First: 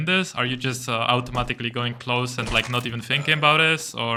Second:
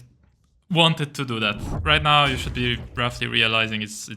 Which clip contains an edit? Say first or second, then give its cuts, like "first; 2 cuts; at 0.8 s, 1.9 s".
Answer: second; 1 cut; at 1.7 s